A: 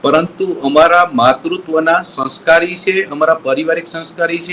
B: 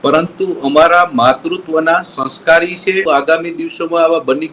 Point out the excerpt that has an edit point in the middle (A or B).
B